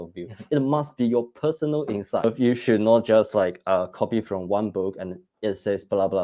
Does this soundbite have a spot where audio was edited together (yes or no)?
yes